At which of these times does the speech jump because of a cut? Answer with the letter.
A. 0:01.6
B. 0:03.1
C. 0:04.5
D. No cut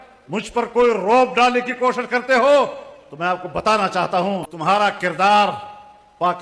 C